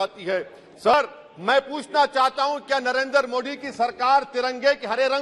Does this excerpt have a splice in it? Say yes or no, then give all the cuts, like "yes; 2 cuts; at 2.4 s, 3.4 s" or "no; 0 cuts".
yes; 1 cut; at 0.9 s